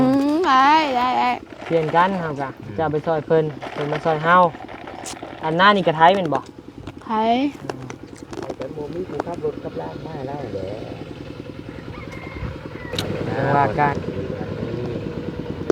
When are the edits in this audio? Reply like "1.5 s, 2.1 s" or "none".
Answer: 13.9 s